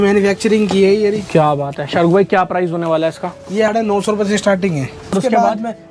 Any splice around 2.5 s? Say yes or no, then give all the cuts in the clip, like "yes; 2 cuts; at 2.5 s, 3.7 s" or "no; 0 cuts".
no; 2 cuts; at 3.7 s, 5.1 s